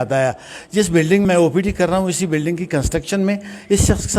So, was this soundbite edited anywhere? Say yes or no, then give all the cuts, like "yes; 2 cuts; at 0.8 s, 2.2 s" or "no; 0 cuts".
yes; 1 cut; at 1.2 s